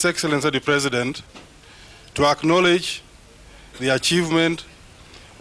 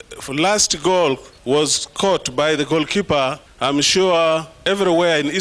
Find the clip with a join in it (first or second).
second